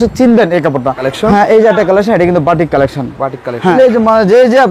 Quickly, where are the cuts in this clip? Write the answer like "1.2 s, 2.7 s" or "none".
1.0 s, 3.8 s